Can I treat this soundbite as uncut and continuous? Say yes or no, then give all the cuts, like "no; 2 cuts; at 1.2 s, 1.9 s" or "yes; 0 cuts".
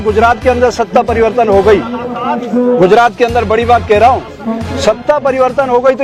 yes; 0 cuts